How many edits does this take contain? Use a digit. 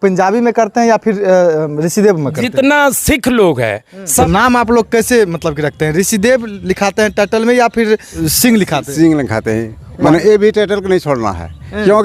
3